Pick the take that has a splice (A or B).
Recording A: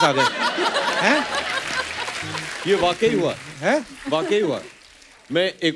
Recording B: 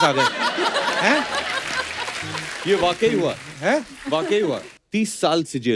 B